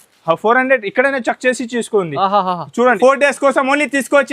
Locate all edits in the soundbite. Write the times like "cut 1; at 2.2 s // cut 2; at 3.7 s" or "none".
cut 1; at 3.0 s

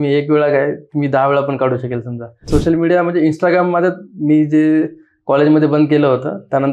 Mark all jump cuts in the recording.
cut 1; at 2.5 s

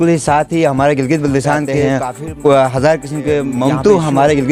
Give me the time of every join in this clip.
cut 1; at 1.8 s // cut 2; at 3.6 s

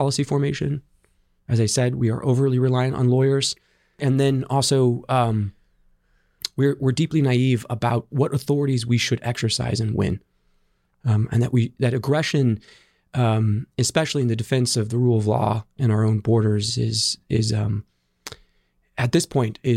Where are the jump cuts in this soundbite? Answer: cut 1; at 3.9 s

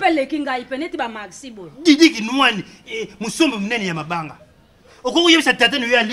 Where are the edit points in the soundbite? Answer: none

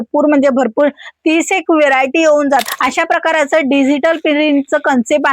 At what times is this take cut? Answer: cut 1; at 2.6 s

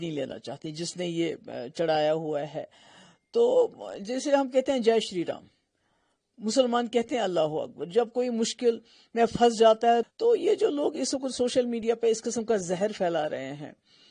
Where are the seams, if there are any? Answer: cut 1; at 10.1 s

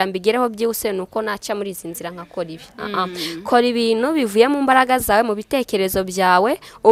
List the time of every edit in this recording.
none

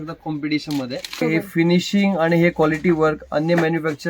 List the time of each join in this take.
cut 1; at 1.2 s

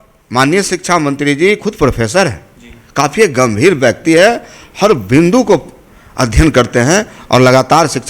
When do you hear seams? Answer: none

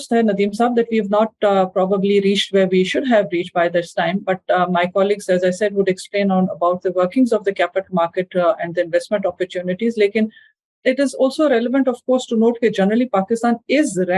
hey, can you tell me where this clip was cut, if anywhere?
none

